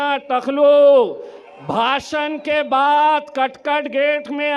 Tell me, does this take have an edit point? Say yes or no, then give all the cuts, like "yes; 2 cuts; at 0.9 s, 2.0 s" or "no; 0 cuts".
no; 0 cuts